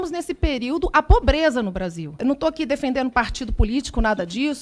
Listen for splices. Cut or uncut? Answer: cut